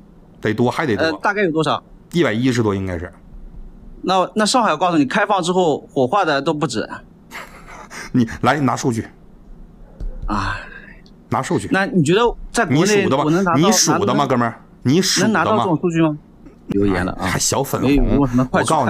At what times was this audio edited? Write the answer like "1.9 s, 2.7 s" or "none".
16.7 s

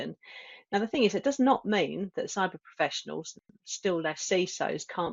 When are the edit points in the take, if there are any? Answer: none

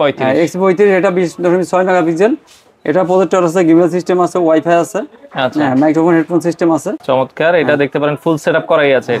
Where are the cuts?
6.9 s

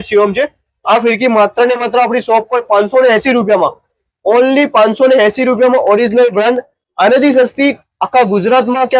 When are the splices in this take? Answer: none

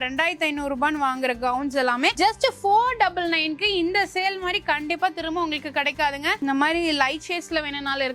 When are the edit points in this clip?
6.4 s

